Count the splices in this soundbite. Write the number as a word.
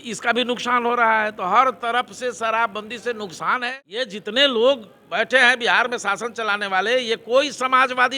one